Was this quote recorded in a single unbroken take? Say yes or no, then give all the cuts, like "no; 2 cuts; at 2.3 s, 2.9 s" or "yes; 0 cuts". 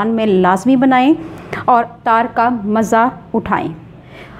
yes; 0 cuts